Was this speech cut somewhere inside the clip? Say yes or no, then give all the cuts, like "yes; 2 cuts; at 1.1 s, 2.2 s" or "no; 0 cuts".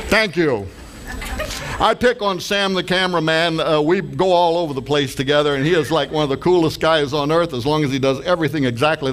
no; 0 cuts